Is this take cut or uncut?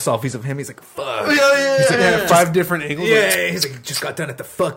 uncut